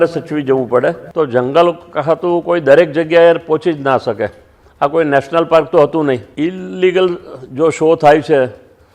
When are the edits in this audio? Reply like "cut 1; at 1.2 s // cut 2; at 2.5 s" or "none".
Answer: cut 1; at 1.0 s // cut 2; at 6.3 s